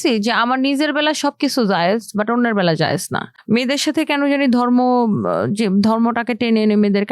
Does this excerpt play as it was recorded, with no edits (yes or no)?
no